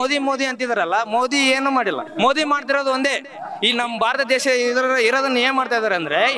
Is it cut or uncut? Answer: cut